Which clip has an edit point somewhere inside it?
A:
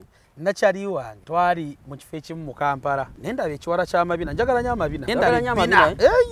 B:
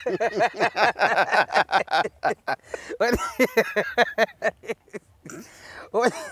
A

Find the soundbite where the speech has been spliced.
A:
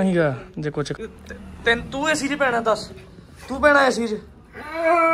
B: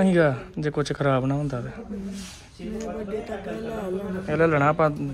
A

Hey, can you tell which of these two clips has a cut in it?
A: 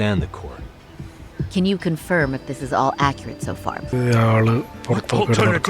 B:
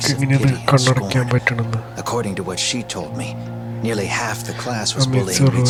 A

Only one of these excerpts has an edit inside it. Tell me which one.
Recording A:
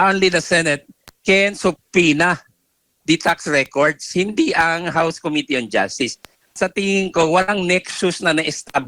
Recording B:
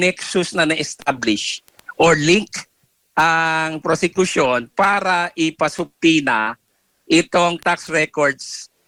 A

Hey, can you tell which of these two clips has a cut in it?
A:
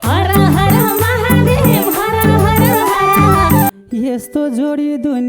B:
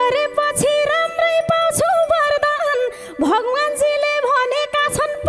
A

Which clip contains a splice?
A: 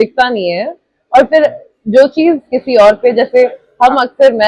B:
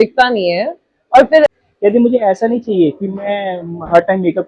B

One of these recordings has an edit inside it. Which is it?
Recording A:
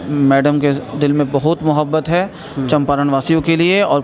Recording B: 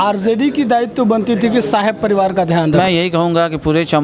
B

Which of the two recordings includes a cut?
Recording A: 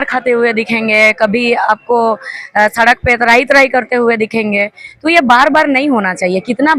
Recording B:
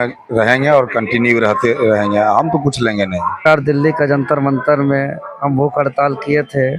B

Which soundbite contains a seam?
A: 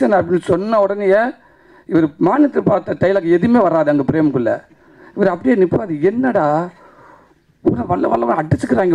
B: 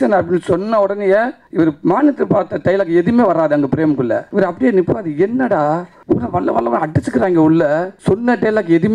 B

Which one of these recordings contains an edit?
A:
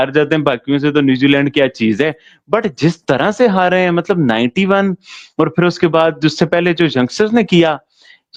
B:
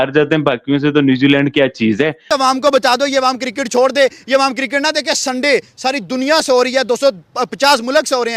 B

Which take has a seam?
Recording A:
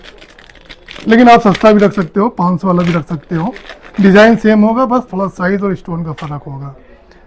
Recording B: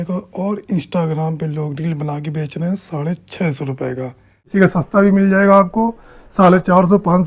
B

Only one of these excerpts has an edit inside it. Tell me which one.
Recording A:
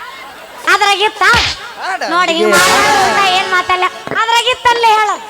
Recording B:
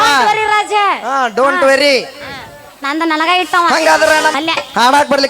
B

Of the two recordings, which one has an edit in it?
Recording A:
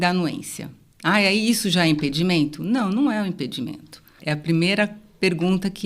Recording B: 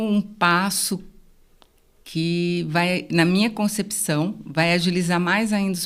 A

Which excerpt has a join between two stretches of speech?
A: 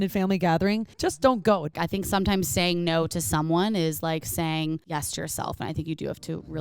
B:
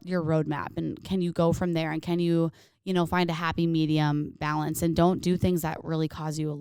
A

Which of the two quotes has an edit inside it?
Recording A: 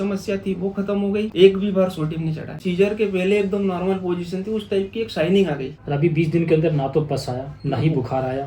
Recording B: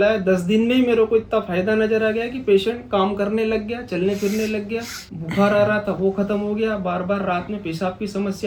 A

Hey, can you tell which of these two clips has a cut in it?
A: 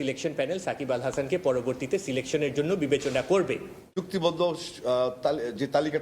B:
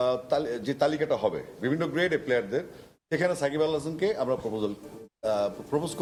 A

